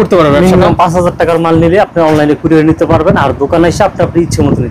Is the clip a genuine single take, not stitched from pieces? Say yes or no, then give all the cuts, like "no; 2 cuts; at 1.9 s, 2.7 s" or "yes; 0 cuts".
yes; 0 cuts